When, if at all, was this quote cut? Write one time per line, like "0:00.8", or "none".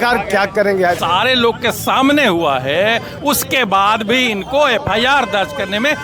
0:01.0